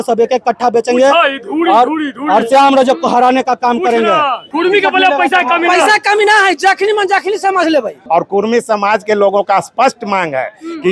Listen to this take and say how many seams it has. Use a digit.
2